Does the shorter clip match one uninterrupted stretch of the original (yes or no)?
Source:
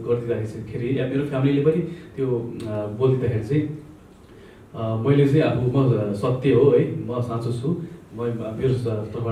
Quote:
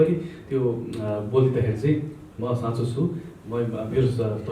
no